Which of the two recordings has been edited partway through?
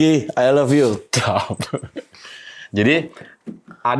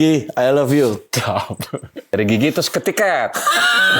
second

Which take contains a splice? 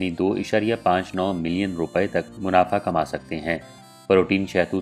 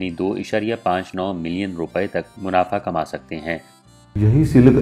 second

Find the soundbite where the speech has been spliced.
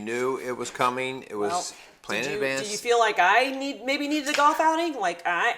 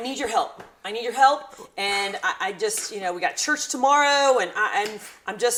first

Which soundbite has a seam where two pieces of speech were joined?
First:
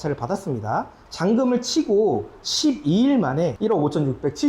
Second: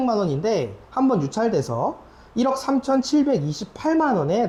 first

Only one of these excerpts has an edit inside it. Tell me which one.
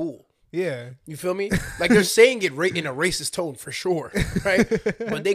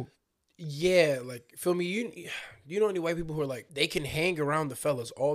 second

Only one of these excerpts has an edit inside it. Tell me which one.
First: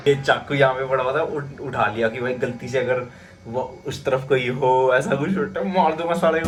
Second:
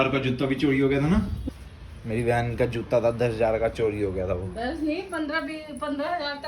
second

